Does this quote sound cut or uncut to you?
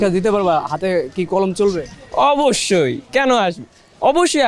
uncut